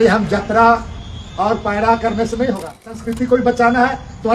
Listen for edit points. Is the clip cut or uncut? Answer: cut